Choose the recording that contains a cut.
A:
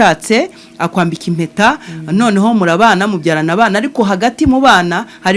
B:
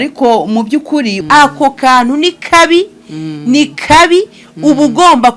B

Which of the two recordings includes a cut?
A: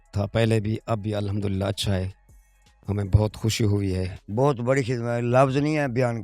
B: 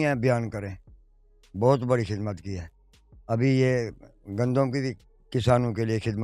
A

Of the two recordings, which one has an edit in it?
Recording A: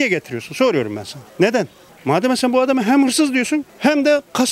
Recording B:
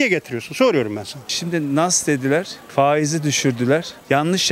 B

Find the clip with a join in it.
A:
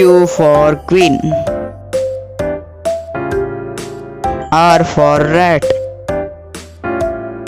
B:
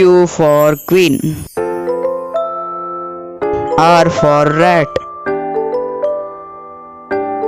A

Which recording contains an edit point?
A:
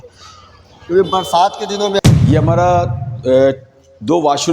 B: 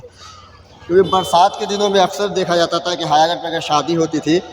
A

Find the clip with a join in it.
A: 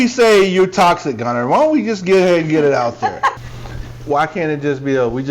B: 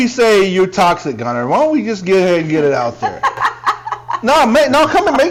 A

